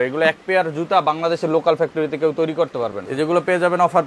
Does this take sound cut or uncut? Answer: cut